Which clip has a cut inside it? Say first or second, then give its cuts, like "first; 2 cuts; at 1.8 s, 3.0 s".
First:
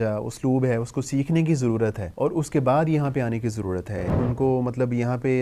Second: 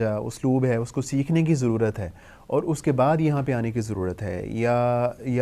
first; 2 cuts; at 2.0 s, 4.1 s